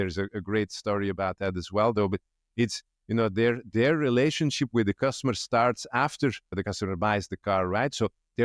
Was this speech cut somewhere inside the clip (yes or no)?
yes